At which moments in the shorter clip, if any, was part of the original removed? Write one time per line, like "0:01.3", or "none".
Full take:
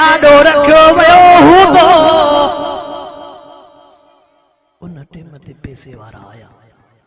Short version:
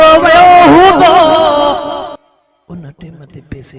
0:02.2